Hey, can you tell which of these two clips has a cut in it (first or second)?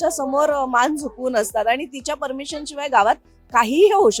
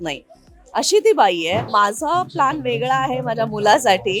second